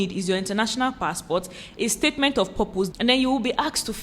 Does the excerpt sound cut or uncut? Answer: cut